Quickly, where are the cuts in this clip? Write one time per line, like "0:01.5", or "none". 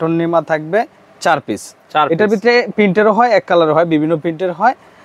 none